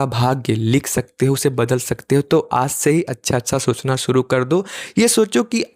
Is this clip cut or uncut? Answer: uncut